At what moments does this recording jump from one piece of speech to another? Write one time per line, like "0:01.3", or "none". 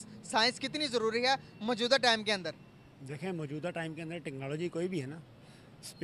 none